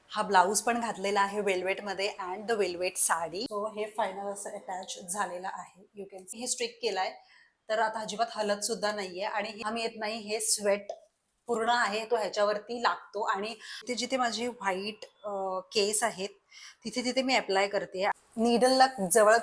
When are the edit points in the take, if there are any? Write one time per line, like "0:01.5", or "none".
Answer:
0:03.5
0:06.4
0:09.6
0:13.9
0:18.1